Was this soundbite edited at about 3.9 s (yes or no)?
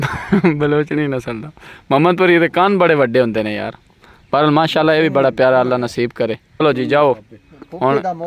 no